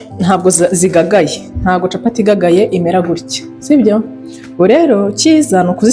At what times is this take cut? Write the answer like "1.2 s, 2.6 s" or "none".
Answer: none